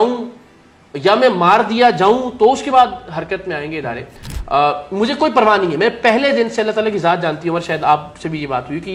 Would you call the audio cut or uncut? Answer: uncut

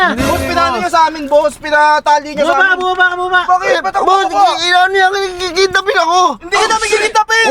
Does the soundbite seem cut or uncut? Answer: uncut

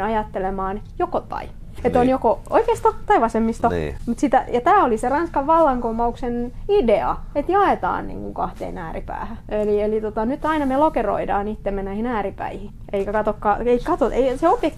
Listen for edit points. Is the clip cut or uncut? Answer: cut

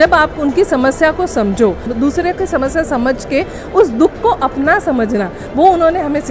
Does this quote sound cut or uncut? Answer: cut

